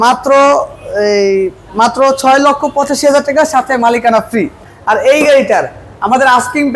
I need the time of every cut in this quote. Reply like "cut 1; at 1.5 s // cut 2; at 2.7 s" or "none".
cut 1; at 4.7 s